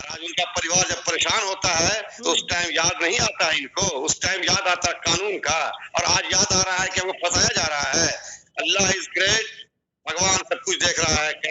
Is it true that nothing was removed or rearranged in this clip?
yes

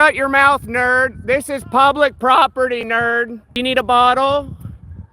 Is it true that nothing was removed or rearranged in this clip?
no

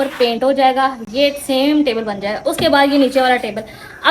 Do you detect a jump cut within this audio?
no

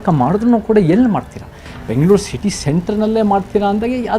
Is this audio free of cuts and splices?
no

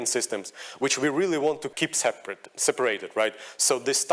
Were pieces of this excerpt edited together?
yes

